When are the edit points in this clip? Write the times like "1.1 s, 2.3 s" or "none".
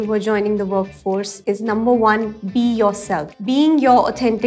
1.3 s, 3.3 s